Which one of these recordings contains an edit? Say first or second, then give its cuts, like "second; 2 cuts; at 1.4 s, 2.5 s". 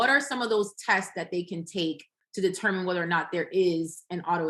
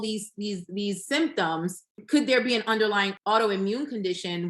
second; 2 cuts; at 2.0 s, 3.1 s